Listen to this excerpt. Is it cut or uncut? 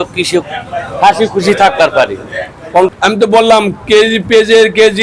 cut